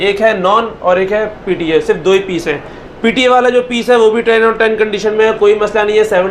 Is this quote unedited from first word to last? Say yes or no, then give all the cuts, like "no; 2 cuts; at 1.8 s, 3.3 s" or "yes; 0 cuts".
yes; 0 cuts